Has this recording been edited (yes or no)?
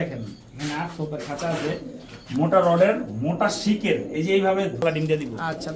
yes